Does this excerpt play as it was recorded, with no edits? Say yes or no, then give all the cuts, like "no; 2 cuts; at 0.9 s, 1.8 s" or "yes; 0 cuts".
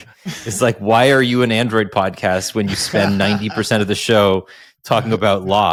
yes; 0 cuts